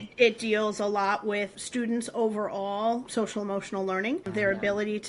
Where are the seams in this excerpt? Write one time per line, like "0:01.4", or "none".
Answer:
0:01.6
0:03.1
0:04.3